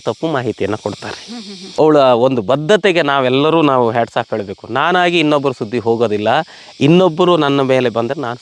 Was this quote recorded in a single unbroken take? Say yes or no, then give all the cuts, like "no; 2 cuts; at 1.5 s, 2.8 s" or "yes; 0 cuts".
no; 1 cut; at 1.6 s